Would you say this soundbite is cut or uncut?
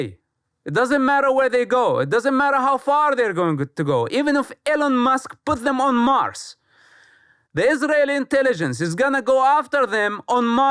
uncut